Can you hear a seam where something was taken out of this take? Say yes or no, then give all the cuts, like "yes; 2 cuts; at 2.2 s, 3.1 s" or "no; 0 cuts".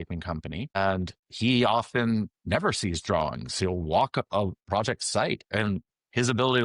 yes; 1 cut; at 1.0 s